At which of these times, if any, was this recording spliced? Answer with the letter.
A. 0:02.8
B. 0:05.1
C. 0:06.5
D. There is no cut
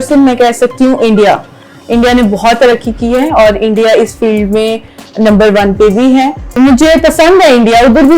C